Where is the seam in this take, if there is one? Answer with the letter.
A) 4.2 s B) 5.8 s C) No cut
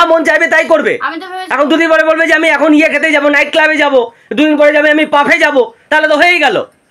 C